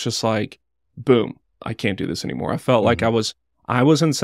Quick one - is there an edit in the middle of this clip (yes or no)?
yes